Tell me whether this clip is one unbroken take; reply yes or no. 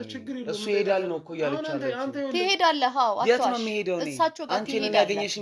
yes